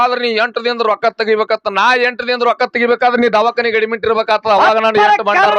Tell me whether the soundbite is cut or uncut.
uncut